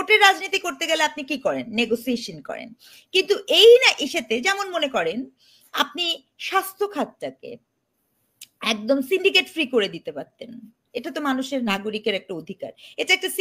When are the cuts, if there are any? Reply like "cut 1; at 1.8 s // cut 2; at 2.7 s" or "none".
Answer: none